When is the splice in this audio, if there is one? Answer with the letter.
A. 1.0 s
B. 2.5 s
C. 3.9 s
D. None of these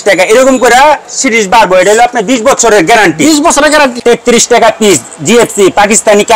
C